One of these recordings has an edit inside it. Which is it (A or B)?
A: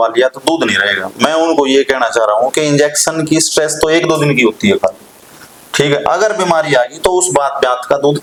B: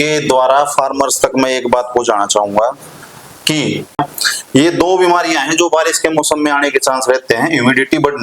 B